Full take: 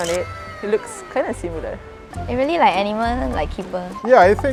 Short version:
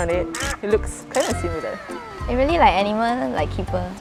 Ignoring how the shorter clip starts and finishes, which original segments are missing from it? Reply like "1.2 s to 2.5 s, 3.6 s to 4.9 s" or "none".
none